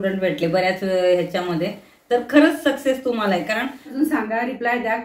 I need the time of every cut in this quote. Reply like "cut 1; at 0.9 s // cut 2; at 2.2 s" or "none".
cut 1; at 3.9 s